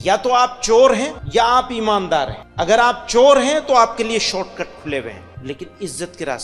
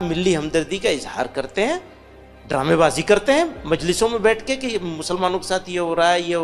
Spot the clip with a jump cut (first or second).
first